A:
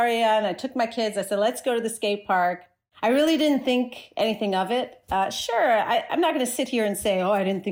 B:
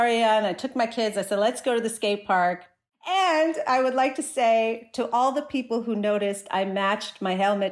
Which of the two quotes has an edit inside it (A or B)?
B